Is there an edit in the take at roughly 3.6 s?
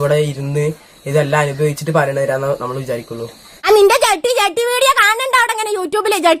yes; 1 cut; at 3.6 s

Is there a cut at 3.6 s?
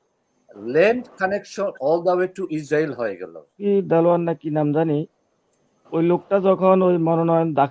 yes; 1 cut; at 3.6 s

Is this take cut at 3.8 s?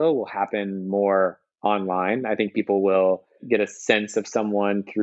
no; 1 cut; at 1.5 s

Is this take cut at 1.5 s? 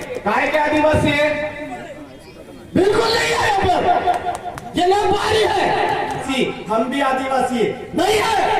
no; 1 cut; at 6.3 s

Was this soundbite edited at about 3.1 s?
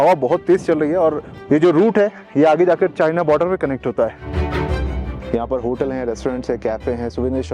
no; 2 cuts; at 1.3 s, 4.7 s

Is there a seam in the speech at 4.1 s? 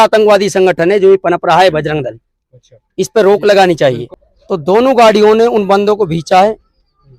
yes; 1 cut; at 4.1 s

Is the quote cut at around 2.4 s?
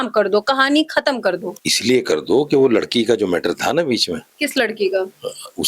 no; 0 cuts

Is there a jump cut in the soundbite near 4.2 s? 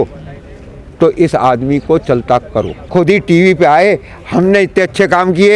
no; 1 cut; at 2.8 s

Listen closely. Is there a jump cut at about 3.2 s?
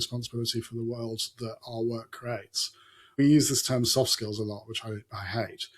yes; 1 cut; at 3.2 s

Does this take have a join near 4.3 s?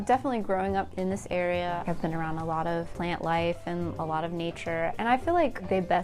no; 3 cuts; at 0.9 s, 1.8 s, 2.9 s

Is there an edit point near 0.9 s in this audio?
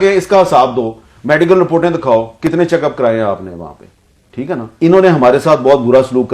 no; 1 cut; at 4.7 s

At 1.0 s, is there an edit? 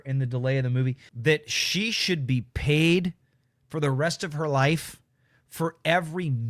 yes; 1 cut; at 1.0 s

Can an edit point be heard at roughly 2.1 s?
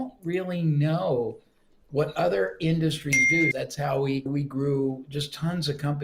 no; 1 cut; at 3.5 s

